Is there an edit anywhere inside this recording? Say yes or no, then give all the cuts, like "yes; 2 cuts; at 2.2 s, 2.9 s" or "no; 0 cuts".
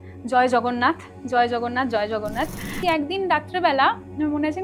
yes; 1 cut; at 2.8 s